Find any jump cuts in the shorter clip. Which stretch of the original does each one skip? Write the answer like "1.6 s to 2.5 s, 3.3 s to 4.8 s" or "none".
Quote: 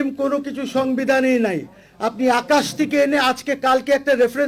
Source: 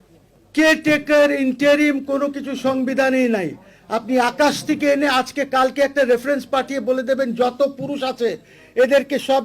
none